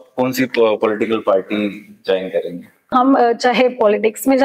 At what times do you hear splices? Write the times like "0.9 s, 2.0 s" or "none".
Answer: 2.9 s

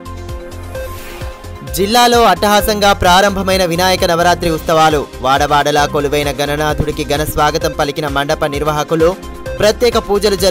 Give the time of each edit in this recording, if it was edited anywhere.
1.2 s

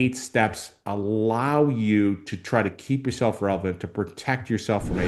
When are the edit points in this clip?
none

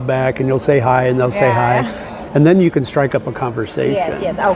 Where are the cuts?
none

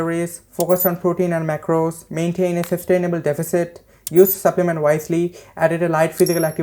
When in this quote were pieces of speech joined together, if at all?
none

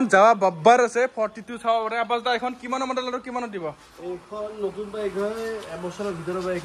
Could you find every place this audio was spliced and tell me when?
none

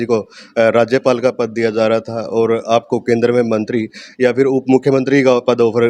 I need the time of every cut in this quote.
none

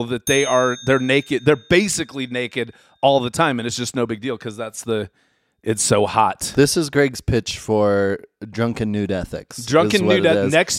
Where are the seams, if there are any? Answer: none

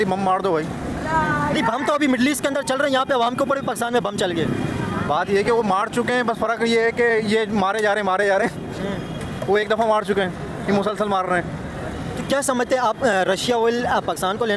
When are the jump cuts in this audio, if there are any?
none

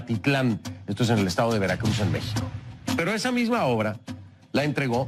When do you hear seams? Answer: none

